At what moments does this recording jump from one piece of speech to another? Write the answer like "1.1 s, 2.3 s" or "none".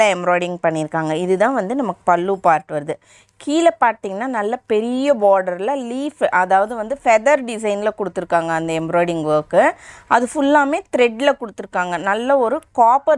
none